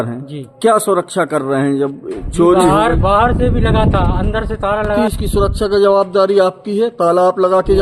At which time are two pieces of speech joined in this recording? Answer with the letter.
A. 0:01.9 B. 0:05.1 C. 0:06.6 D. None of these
B